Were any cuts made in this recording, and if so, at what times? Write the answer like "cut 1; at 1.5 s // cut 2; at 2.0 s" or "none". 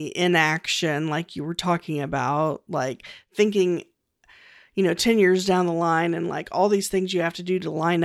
cut 1; at 3.3 s